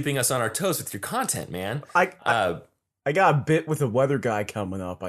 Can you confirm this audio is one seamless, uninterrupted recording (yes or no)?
yes